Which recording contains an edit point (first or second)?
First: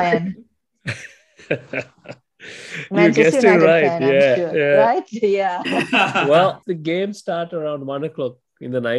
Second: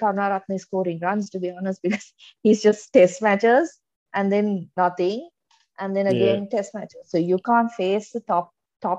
first